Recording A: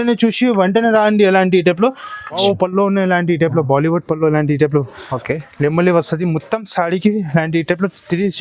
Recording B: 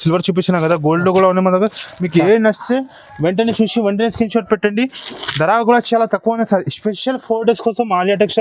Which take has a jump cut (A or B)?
A